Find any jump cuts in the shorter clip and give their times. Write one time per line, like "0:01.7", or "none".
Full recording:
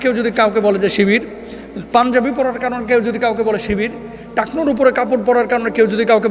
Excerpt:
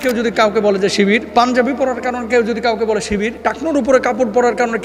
0:01.3
0:03.3